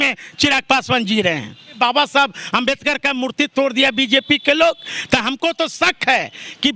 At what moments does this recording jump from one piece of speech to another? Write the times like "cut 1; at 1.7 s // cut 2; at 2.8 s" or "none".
cut 1; at 1.7 s